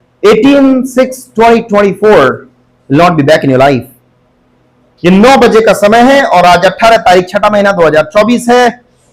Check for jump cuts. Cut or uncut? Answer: uncut